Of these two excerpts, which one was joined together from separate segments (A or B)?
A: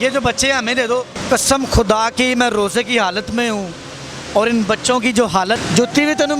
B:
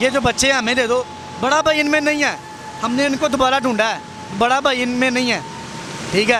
A